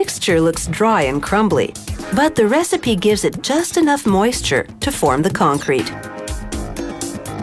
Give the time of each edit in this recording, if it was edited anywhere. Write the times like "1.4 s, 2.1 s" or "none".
none